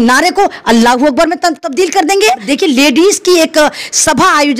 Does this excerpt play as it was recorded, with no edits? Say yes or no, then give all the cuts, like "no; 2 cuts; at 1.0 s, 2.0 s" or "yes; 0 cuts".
no; 1 cut; at 2.5 s